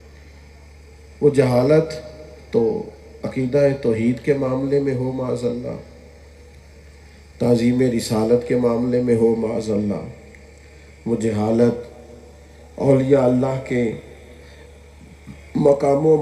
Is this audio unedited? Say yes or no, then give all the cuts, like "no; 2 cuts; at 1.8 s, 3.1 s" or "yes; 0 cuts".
yes; 0 cuts